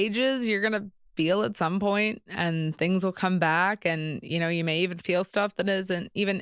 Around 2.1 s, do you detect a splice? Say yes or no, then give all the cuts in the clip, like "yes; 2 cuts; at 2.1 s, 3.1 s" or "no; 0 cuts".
no; 0 cuts